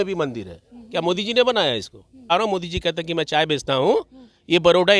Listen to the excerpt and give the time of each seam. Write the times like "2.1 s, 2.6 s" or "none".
2.3 s